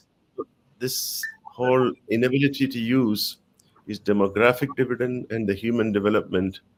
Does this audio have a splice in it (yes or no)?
no